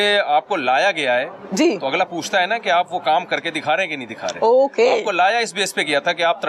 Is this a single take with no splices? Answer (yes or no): yes